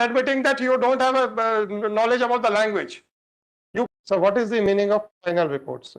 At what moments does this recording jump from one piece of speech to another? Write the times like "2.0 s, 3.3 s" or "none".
3.9 s

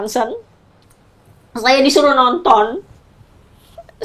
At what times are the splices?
none

